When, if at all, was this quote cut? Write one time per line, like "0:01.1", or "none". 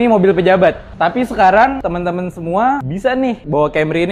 0:01.8
0:03.2